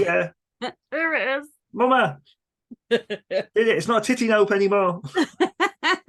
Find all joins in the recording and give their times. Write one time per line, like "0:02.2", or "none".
none